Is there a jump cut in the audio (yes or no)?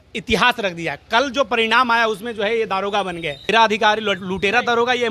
yes